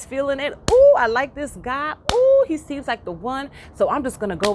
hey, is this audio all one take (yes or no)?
yes